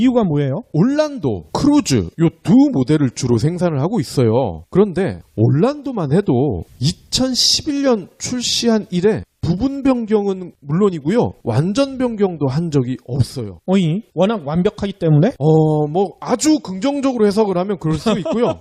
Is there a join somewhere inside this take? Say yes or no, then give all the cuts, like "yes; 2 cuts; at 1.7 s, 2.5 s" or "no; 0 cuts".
no; 0 cuts